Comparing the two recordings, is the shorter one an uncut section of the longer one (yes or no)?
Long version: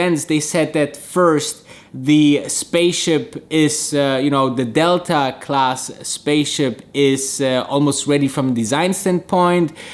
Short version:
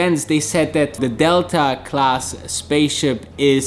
no